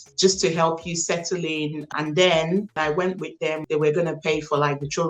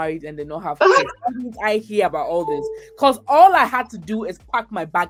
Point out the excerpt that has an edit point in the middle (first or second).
first